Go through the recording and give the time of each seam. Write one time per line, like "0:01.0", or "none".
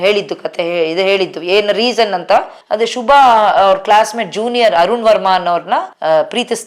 0:02.5